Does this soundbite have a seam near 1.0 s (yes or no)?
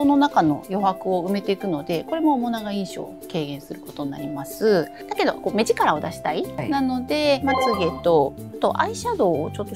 no